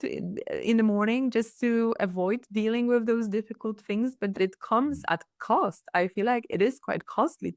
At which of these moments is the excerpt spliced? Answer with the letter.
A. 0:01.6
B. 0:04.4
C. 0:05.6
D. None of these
B